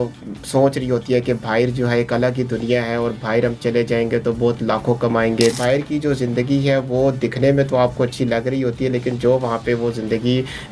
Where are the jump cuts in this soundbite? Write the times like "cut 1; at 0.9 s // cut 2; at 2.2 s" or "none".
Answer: cut 1; at 5.5 s